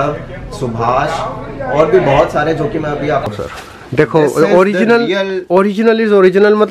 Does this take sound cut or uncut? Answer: cut